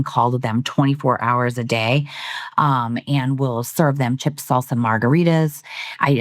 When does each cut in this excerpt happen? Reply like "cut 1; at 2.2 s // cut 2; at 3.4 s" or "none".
none